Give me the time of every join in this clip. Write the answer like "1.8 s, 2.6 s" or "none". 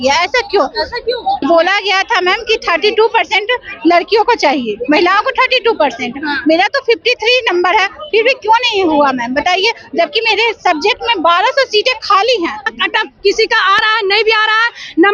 1.4 s, 12.7 s